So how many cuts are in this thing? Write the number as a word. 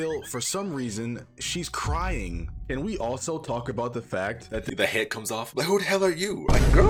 zero